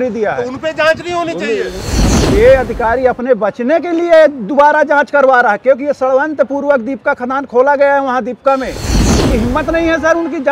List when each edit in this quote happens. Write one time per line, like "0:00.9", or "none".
0:01.9
0:09.0